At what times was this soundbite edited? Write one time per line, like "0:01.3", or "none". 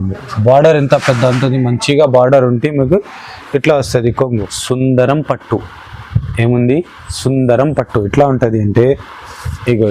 0:04.5